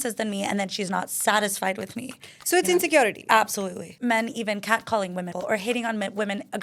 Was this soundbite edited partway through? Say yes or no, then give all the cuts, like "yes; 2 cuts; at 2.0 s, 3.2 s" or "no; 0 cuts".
yes; 2 cuts; at 3.9 s, 5.3 s